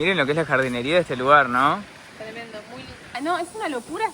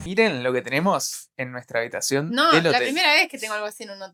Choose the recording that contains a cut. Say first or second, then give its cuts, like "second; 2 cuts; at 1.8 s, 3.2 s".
first; 1 cut; at 3.2 s